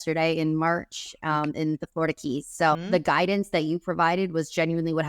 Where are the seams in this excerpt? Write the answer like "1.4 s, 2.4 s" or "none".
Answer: 2.8 s